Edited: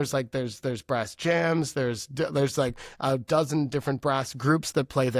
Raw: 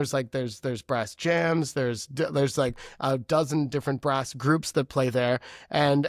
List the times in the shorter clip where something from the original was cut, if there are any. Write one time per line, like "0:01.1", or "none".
none